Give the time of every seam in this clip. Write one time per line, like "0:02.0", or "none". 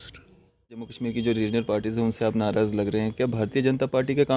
0:00.9